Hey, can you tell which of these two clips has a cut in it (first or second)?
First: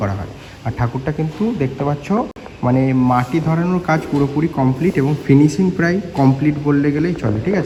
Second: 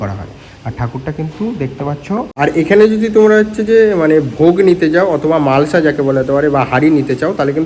second